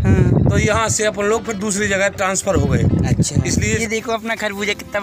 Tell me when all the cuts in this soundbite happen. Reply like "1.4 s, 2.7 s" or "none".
3.8 s